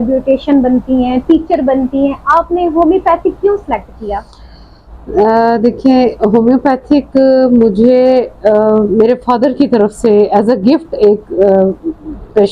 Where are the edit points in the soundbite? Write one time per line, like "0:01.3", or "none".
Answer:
none